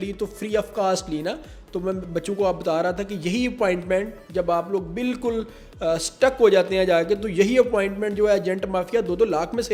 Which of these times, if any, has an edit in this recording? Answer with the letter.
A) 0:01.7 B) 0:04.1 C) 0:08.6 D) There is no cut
D